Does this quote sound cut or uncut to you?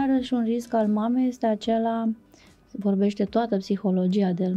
uncut